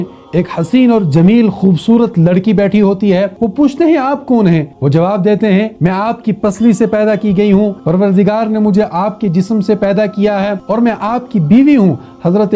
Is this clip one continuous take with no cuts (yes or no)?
yes